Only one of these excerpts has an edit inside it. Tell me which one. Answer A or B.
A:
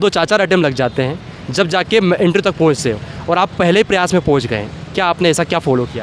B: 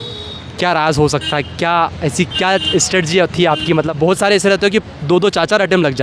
B